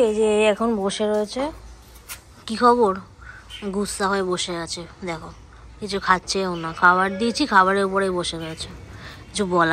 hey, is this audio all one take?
yes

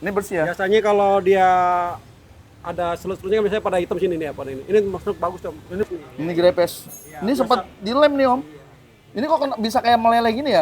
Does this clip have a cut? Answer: yes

